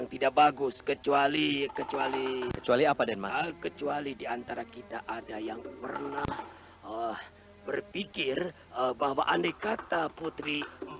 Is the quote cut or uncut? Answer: cut